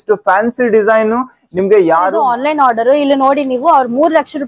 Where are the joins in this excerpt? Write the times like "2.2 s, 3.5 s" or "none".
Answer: 2.1 s